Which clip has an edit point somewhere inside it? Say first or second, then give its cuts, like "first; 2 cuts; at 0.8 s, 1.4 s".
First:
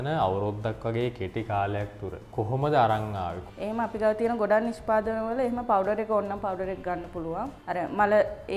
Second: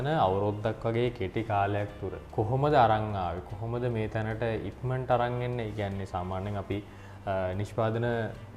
first; 1 cut; at 3.5 s